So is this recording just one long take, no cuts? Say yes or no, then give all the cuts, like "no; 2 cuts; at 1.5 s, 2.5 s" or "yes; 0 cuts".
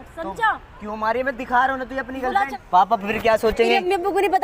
no; 1 cut; at 2.6 s